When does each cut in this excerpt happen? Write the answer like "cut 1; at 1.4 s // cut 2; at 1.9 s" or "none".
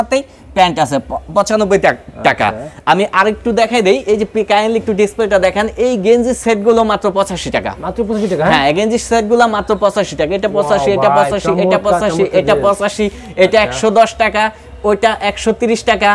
none